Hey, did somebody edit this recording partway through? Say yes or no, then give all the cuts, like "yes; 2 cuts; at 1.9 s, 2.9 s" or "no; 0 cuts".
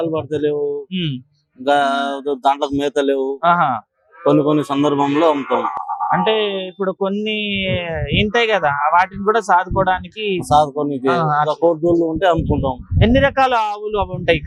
no; 0 cuts